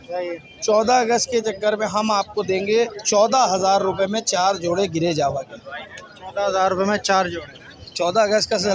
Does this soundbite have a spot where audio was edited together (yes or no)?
no